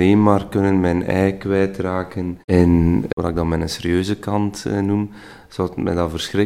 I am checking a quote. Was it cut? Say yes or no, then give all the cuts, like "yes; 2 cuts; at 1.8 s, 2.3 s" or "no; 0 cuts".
no; 0 cuts